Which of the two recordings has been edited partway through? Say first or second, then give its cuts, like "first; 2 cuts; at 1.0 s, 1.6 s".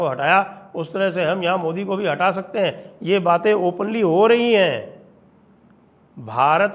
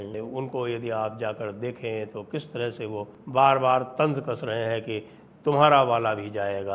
second; 1 cut; at 3.1 s